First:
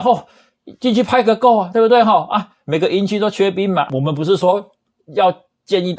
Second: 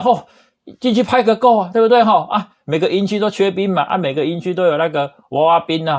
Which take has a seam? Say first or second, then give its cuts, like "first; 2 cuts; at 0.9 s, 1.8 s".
first; 1 cut; at 3.9 s